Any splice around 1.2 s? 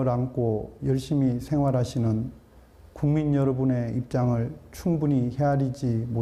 no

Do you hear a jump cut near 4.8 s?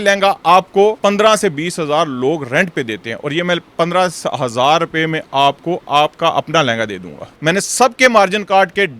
no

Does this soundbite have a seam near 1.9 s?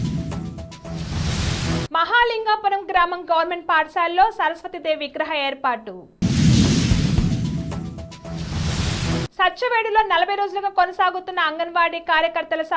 yes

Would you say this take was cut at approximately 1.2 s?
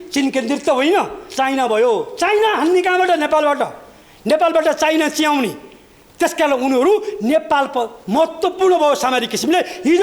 yes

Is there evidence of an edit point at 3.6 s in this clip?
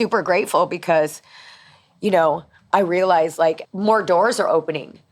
yes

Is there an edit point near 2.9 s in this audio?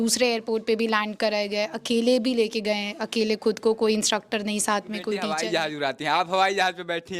no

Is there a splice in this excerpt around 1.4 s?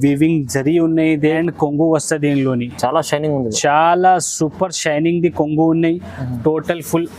yes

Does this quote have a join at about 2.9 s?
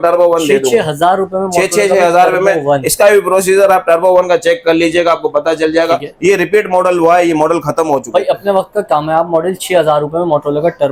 no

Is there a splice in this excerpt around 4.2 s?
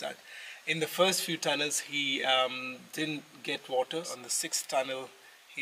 yes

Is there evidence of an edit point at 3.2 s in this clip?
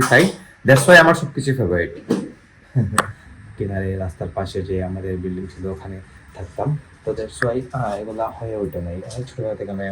yes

